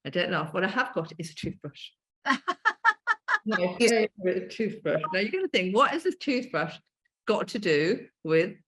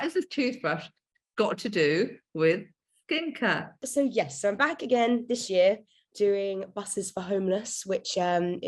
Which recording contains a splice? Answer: second; 1 cut; at 3.8 s

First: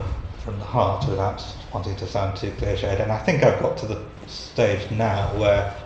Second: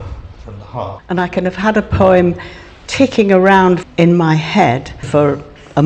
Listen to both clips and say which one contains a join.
second; 3 cuts; at 1.0 s, 3.8 s, 5.1 s

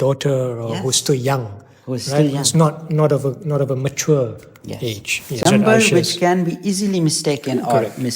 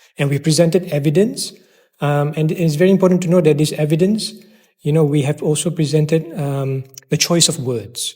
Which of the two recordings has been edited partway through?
first; 1 cut; at 5.3 s

